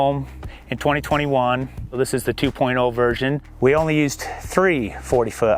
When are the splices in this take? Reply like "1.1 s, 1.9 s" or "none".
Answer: 1.8 s, 3.5 s